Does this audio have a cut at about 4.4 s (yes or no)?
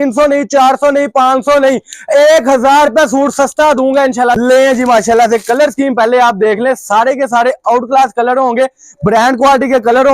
yes